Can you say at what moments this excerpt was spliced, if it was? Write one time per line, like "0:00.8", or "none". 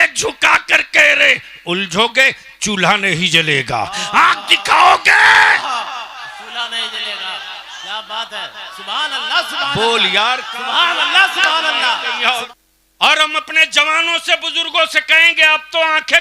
0:12.4